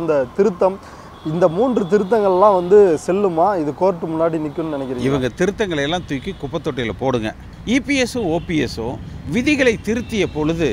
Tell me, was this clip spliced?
yes; 1 cut; at 7.5 s

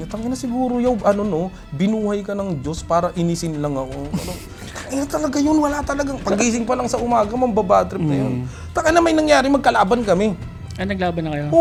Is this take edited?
no; 0 cuts

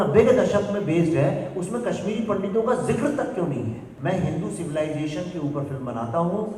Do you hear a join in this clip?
yes; 1 cut; at 3.9 s

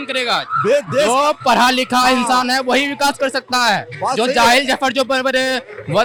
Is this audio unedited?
yes; 0 cuts

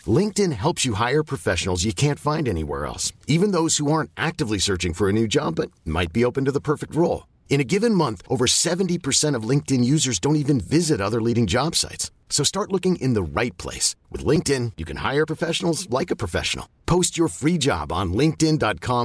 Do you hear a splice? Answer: no; 0 cuts

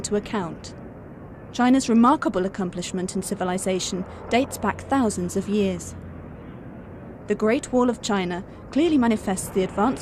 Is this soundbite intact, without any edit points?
yes; 0 cuts

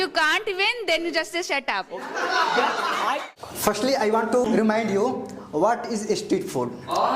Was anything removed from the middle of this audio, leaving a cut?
yes; 2 cuts; at 3.4 s, 4.5 s

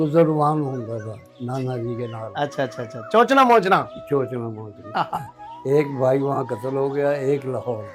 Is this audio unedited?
yes; 0 cuts

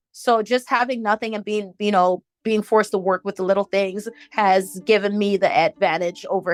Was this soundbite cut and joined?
no; 0 cuts

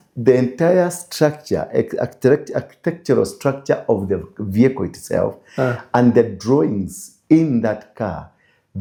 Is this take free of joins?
yes; 0 cuts

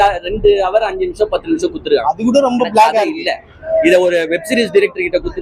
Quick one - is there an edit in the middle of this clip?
no; 0 cuts

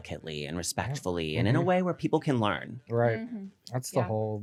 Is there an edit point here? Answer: no; 0 cuts

